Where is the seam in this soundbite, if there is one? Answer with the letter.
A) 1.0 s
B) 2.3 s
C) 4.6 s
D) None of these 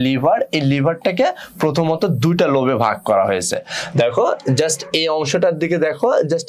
D